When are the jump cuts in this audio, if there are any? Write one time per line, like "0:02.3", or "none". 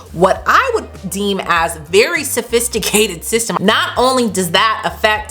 0:03.5